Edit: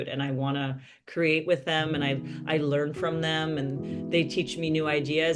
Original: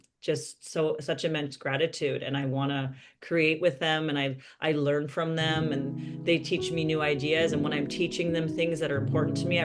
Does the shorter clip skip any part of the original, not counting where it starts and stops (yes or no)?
no